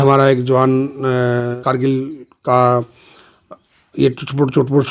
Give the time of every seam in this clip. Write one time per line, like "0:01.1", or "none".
0:01.6